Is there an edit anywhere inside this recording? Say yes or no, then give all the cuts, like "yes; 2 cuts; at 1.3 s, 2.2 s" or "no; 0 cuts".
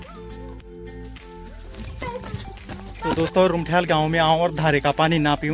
yes; 1 cut; at 1.8 s